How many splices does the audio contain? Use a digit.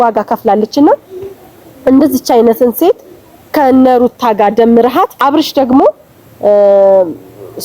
1